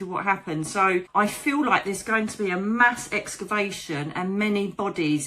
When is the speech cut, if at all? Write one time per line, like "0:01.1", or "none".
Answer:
0:01.1